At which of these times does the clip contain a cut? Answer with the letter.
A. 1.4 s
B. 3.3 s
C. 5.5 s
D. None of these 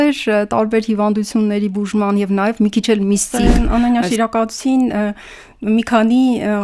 B